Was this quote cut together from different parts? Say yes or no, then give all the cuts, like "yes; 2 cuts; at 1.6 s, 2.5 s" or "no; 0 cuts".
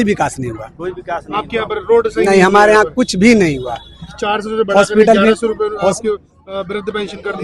no; 0 cuts